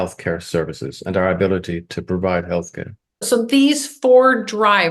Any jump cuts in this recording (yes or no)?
yes